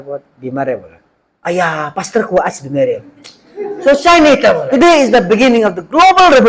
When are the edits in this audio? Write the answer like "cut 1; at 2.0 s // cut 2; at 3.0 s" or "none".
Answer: cut 1; at 4.6 s